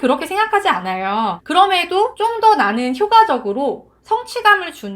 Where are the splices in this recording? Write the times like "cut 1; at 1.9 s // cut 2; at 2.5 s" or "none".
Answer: cut 1; at 1.4 s // cut 2; at 2.1 s

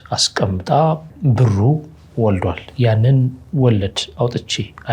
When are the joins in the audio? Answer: cut 1; at 1.1 s

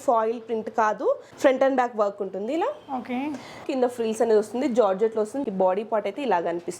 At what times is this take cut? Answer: cut 1; at 1.3 s // cut 2; at 3.7 s // cut 3; at 5.4 s

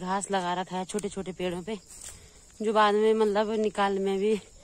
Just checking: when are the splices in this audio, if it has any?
none

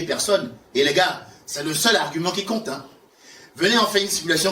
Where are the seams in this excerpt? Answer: none

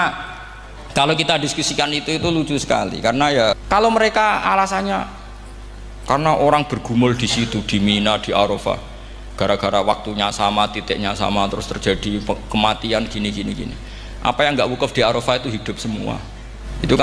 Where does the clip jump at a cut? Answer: cut 1; at 3.6 s

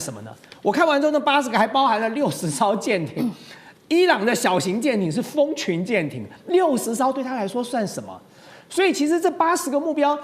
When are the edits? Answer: none

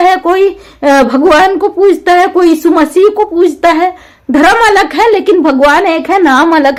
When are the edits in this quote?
none

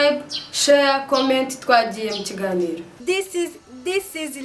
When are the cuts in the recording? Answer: cut 1; at 2.9 s

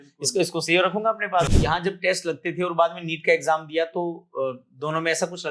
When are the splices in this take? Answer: cut 1; at 1.8 s

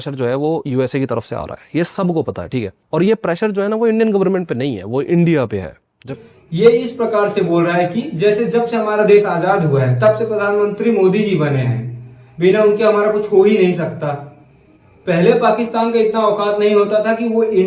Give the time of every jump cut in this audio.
none

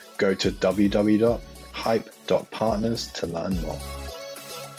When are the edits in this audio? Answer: cut 1; at 3.8 s

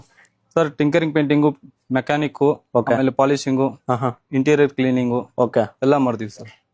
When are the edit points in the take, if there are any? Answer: none

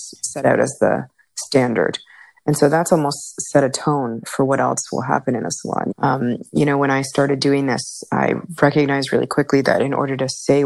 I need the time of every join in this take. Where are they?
cut 1; at 4.3 s // cut 2; at 5.9 s

